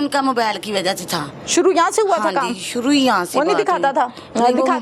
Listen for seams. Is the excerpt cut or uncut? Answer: uncut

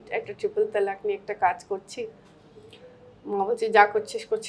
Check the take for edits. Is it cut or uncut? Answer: uncut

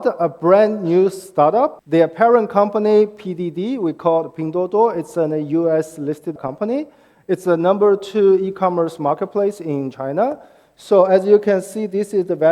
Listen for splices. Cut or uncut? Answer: cut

